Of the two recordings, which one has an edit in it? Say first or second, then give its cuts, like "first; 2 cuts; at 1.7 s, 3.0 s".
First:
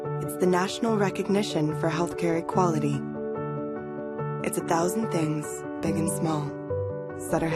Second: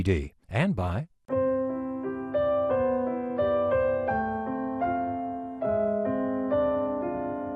second; 1 cut; at 1.2 s